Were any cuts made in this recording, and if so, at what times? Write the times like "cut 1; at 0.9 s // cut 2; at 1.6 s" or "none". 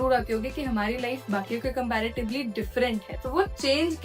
cut 1; at 3.1 s